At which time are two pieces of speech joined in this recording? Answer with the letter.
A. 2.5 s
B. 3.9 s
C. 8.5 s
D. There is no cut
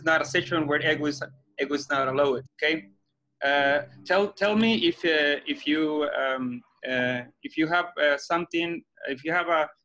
A